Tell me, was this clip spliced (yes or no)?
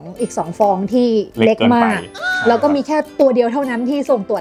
no